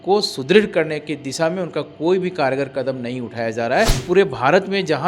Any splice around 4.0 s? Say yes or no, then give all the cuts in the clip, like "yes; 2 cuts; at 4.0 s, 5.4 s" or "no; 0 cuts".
yes; 1 cut; at 4.0 s